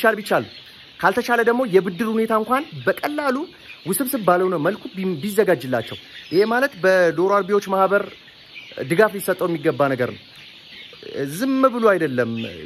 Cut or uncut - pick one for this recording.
uncut